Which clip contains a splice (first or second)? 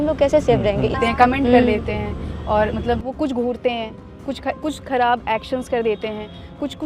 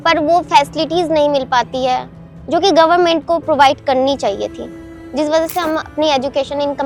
first